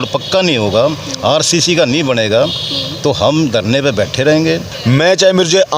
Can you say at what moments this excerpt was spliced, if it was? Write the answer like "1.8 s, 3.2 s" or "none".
4.7 s